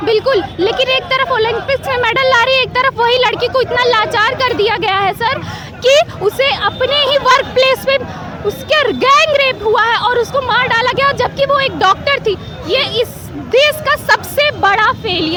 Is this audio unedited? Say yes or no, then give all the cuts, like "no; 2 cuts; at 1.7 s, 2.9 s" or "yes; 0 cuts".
yes; 0 cuts